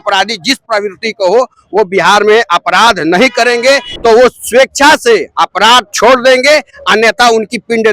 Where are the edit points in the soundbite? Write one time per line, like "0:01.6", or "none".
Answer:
0:03.9